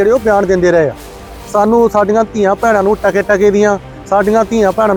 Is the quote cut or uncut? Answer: uncut